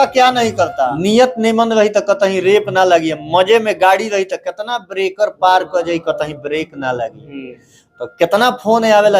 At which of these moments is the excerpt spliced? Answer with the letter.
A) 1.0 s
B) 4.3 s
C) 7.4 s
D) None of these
A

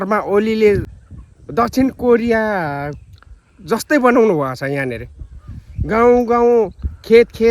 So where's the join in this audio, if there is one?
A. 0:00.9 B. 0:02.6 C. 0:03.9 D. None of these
A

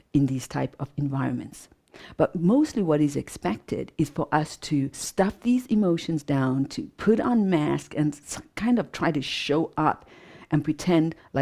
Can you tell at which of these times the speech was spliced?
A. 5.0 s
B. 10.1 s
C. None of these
A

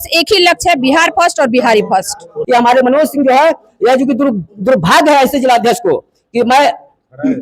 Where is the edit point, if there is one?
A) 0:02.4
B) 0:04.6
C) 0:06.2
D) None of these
A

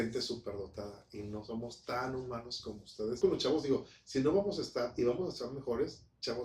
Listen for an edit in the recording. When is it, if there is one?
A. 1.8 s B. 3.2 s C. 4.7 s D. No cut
B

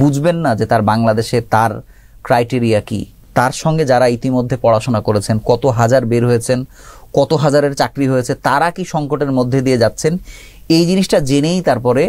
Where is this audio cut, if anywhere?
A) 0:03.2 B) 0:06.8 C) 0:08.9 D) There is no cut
A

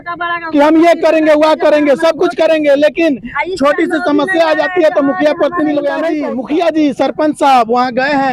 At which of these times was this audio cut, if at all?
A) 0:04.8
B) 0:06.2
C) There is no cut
B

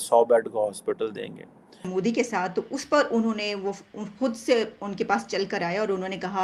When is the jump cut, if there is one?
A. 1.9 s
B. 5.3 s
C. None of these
A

